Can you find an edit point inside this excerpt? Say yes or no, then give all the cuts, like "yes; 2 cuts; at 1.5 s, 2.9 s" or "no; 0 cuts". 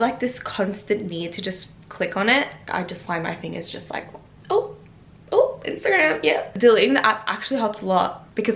no; 0 cuts